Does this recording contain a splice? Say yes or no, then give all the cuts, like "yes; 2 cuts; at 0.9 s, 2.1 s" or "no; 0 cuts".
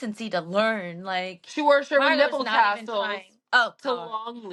no; 0 cuts